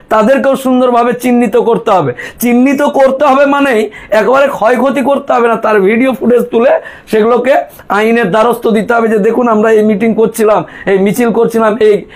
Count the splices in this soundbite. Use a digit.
0